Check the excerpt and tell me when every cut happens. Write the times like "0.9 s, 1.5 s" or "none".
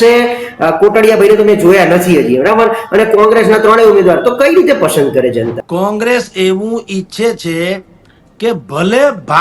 5.6 s